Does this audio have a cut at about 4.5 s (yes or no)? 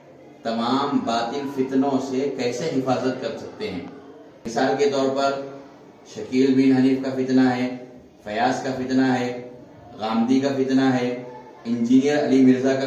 yes